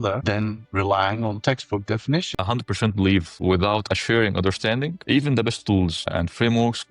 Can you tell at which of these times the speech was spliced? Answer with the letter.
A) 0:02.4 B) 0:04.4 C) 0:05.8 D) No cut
A